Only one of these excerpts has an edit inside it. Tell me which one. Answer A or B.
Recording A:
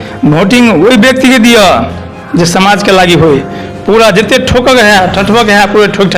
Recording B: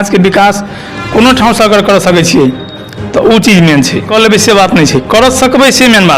B